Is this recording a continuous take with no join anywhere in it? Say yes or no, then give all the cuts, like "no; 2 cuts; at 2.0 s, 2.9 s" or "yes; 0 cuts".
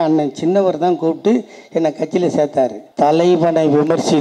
no; 1 cut; at 2.8 s